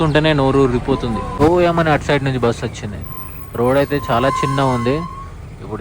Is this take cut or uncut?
cut